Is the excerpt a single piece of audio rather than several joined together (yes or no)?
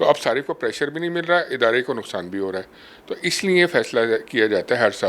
yes